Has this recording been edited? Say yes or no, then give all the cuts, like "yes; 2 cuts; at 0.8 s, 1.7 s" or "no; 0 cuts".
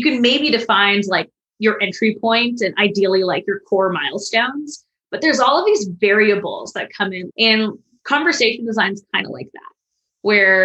yes; 1 cut; at 7.2 s